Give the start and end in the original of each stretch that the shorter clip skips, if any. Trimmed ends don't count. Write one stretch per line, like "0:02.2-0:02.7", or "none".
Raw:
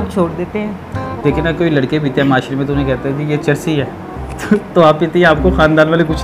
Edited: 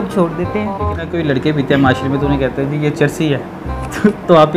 0:01.0-0:01.5